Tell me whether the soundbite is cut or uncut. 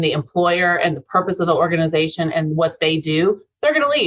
uncut